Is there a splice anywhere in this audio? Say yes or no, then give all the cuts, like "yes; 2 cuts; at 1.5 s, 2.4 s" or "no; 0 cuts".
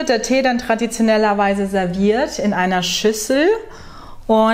no; 0 cuts